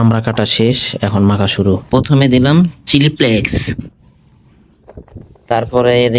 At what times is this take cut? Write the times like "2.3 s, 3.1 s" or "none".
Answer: 2.1 s